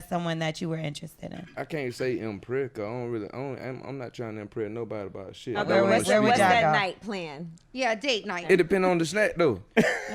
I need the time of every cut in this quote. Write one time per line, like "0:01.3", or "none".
0:05.6
0:08.4